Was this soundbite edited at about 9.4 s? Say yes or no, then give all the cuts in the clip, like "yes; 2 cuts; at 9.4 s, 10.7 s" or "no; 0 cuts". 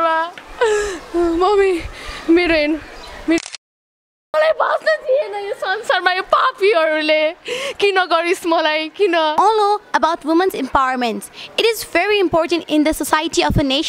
yes; 1 cut; at 9.4 s